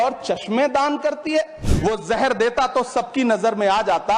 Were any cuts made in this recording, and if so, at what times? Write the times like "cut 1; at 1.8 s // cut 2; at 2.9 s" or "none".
cut 1; at 1.6 s